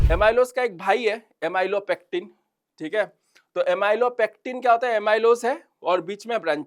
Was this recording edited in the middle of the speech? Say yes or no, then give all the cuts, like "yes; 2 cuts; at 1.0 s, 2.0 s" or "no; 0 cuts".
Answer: no; 0 cuts